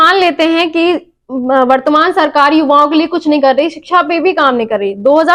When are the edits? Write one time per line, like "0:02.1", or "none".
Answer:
none